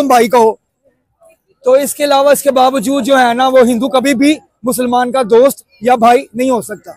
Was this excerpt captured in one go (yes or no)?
yes